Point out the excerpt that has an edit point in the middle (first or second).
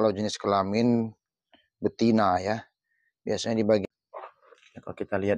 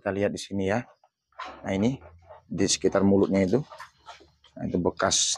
first